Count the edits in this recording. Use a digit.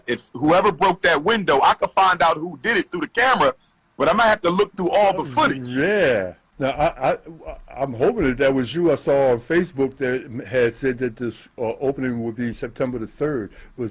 1